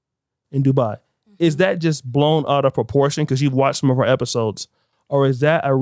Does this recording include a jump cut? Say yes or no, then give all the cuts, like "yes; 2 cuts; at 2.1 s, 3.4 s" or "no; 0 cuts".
no; 0 cuts